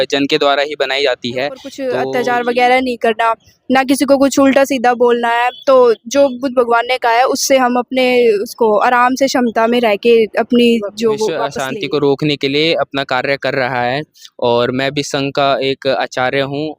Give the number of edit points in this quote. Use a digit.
2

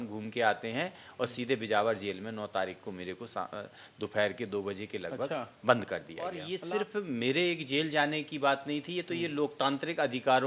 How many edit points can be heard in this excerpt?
1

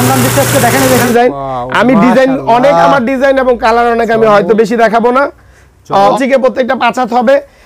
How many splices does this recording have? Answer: 2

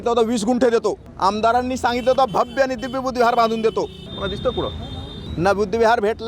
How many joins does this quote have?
3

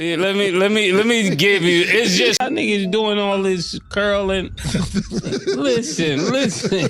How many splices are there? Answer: 1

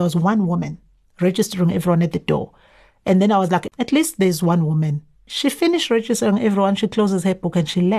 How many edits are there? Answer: 2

